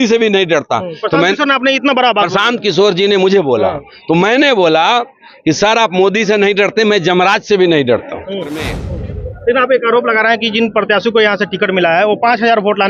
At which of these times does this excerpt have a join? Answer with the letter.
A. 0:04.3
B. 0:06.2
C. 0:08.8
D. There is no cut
C